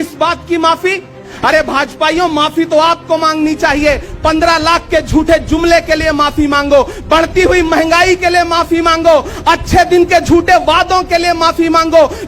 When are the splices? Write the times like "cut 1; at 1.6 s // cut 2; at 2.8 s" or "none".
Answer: cut 1; at 1.3 s